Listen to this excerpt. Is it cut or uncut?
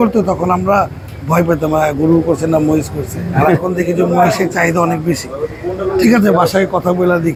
uncut